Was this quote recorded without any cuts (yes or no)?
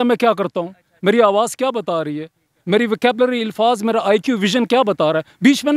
yes